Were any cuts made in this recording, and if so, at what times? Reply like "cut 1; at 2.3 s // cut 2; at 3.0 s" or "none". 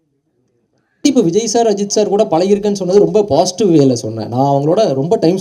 cut 1; at 1.0 s